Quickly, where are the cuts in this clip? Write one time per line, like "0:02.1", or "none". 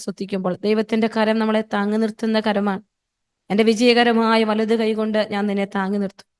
none

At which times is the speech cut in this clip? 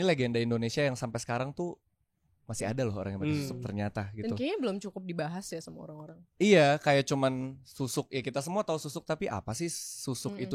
none

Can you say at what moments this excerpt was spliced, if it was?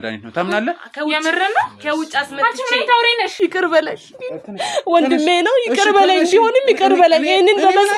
0:03.3

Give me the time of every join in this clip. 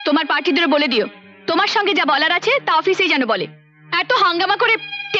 none

